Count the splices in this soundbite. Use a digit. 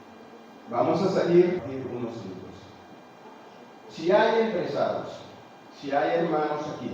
1